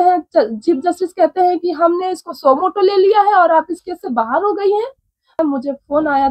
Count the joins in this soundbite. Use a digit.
1